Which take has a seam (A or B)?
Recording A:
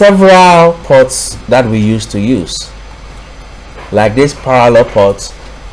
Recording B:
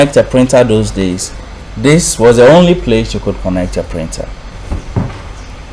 B